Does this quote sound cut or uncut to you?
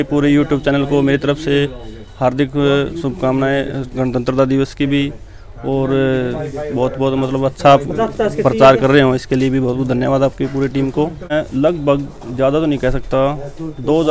cut